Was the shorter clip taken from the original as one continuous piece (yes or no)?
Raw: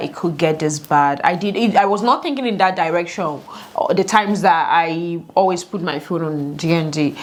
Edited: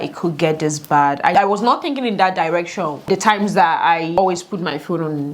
no